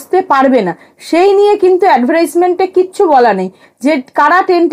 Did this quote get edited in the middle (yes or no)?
no